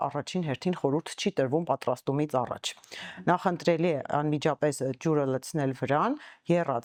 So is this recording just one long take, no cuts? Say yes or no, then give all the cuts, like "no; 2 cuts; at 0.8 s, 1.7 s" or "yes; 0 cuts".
yes; 0 cuts